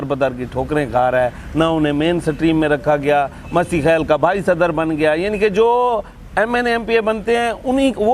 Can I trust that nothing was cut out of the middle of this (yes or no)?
yes